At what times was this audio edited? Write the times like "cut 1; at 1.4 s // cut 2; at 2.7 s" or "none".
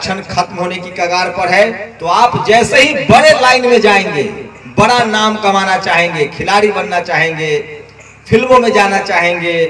cut 1; at 1.9 s

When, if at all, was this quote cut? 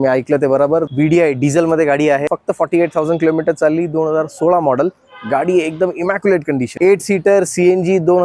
cut 1; at 0.9 s // cut 2; at 2.2 s // cut 3; at 6.7 s

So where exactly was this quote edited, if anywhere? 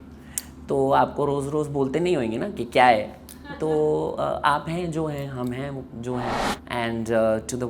cut 1; at 6.5 s

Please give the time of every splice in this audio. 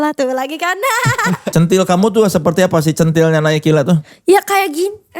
cut 1; at 1.5 s

